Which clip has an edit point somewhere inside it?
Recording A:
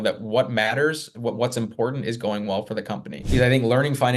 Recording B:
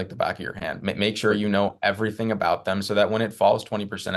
A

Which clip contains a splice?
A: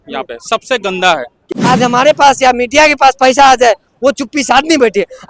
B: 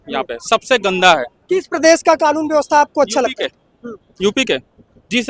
A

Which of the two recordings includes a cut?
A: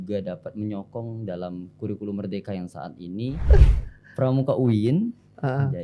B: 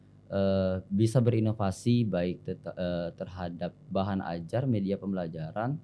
A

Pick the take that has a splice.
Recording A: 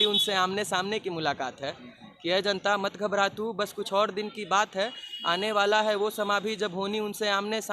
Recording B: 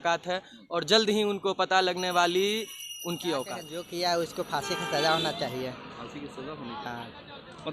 B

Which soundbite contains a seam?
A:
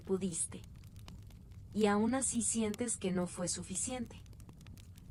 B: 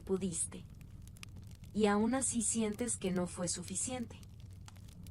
B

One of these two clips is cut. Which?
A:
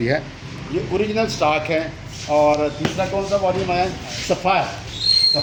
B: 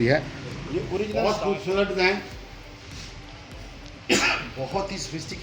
B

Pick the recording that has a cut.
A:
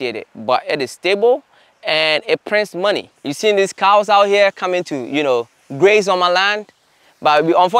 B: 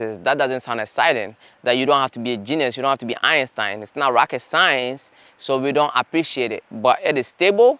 A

